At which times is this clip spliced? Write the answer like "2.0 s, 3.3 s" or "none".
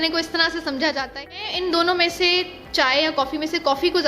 1.3 s